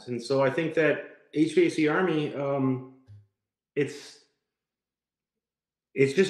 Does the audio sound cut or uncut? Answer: uncut